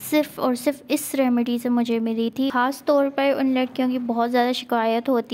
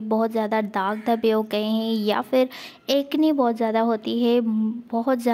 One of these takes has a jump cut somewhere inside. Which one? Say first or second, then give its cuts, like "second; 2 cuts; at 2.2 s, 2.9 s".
first; 1 cut; at 2.5 s